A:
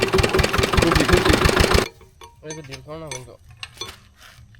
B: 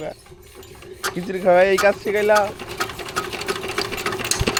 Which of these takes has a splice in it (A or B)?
A